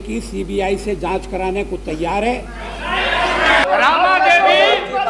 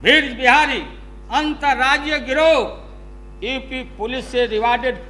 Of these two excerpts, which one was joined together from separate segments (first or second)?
first